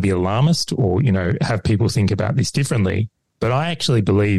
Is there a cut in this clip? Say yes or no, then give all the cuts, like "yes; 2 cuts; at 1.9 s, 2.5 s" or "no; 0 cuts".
no; 0 cuts